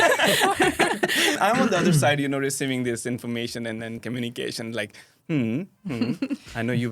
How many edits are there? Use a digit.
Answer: 2